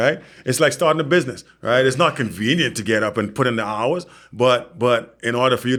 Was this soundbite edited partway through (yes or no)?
no